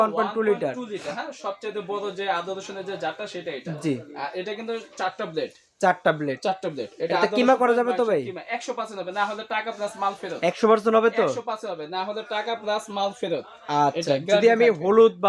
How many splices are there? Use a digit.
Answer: 0